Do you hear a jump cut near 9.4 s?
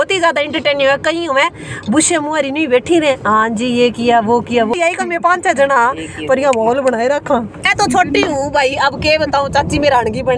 no; 2 cuts; at 4.7 s, 7.6 s

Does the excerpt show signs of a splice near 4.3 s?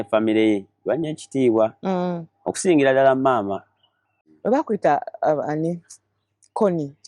yes; 1 cut; at 4.3 s

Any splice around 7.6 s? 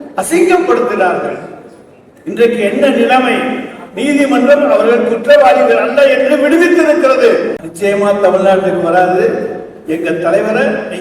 yes; 1 cut; at 7.6 s

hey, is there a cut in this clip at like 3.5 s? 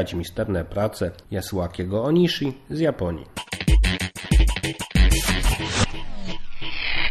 yes; 1 cut; at 3.5 s

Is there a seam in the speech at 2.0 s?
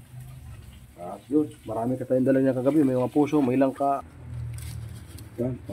no; 1 cut; at 4.1 s

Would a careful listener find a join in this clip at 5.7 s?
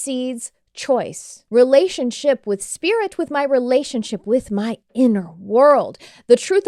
no; 1 cut; at 1.3 s

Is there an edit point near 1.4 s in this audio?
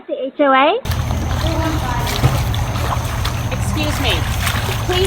yes; 1 cut; at 1.4 s

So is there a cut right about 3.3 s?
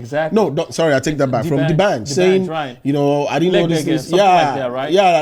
no; 0 cuts

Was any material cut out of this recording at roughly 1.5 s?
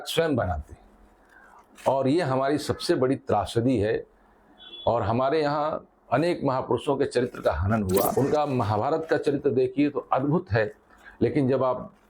no; 1 cut; at 8.1 s

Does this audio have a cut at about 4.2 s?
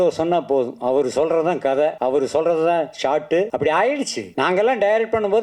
yes; 3 cuts; at 2.0 s, 3.5 s, 4.2 s

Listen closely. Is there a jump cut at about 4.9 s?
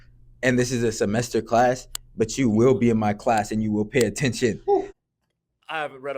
yes; 1 cut; at 4.9 s

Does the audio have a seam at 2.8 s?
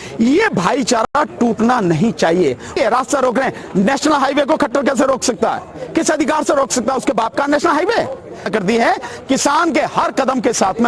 yes; 2 cuts; at 2.8 s, 8.5 s

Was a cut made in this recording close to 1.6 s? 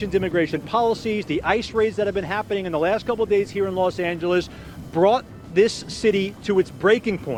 no; 0 cuts

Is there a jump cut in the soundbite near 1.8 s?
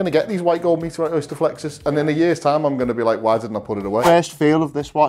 no; 1 cut; at 4.0 s

